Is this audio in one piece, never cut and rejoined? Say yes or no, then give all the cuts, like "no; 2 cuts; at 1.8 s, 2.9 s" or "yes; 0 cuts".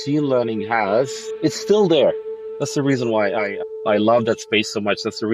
no; 1 cut; at 2.3 s